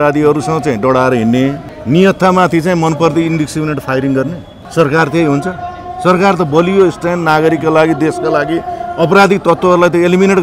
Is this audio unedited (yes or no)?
no